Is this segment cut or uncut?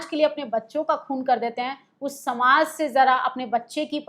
uncut